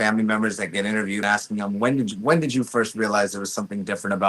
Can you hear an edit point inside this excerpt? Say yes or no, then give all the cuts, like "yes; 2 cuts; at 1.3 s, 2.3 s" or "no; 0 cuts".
yes; 1 cut; at 1.2 s